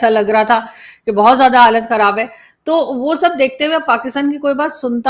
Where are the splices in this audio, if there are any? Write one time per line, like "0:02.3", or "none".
none